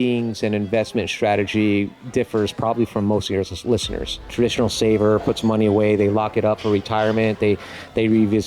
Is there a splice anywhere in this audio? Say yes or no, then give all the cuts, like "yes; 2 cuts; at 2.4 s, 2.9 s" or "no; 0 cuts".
yes; 1 cut; at 4.3 s